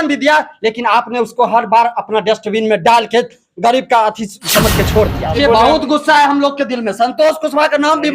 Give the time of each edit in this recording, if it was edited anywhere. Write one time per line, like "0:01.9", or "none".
0:05.3